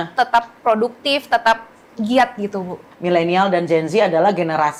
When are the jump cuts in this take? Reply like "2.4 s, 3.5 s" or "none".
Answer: none